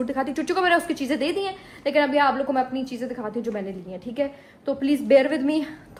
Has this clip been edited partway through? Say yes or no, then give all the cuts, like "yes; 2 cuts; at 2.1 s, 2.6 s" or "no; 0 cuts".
no; 0 cuts